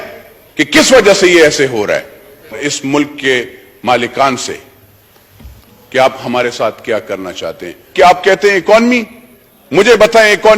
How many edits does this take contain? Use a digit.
2